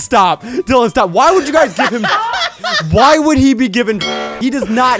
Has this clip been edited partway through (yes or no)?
yes